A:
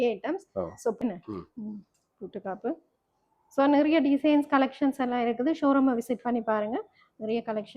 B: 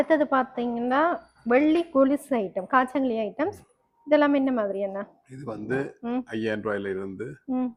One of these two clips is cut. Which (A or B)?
A